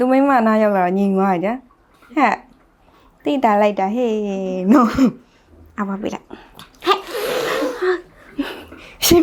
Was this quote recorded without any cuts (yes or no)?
yes